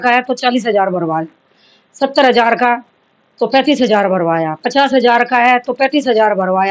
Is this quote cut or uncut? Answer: uncut